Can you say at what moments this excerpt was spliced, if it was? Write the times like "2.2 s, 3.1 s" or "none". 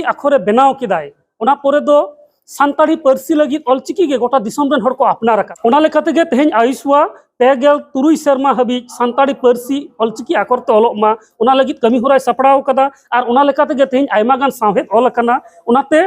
5.5 s